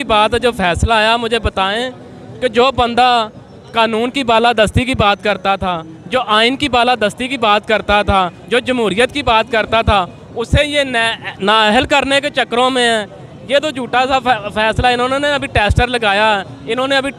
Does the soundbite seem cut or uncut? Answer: uncut